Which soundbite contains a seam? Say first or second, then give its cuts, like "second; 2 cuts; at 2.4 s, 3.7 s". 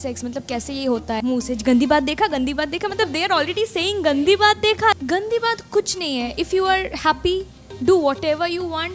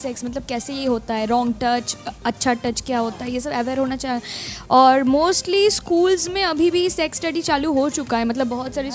first; 2 cuts; at 1.2 s, 5.0 s